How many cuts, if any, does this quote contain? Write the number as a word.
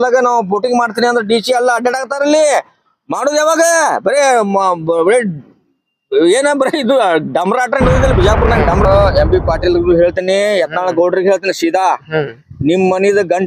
one